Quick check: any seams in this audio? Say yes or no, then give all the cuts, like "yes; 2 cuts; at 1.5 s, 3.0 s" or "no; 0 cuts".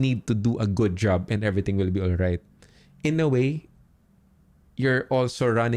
no; 0 cuts